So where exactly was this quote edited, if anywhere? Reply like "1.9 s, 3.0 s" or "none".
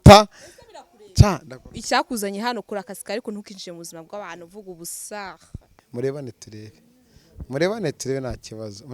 5.8 s